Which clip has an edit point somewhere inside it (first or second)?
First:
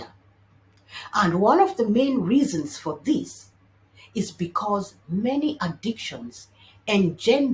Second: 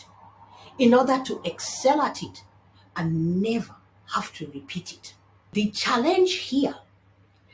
second